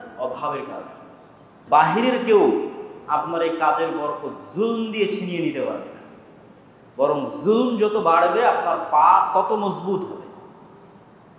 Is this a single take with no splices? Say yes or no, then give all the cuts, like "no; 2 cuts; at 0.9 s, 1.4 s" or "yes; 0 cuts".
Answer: no; 1 cut; at 1.6 s